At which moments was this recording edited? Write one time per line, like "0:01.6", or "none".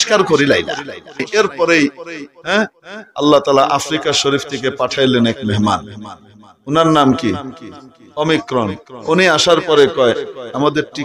0:01.2